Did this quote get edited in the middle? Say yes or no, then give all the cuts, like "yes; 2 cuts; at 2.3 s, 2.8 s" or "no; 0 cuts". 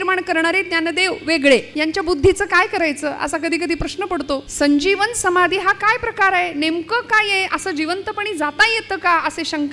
yes; 2 cuts; at 1.7 s, 4.5 s